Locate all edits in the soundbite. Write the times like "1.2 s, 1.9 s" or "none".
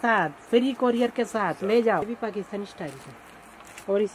2.0 s